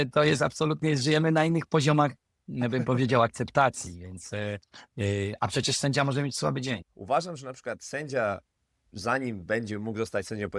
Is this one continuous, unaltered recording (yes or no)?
no